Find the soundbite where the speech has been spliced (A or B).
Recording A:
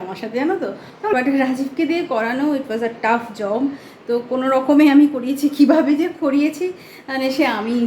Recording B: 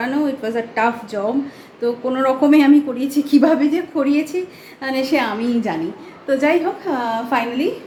A